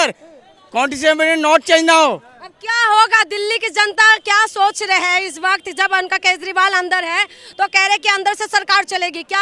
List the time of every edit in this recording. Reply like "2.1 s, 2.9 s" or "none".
none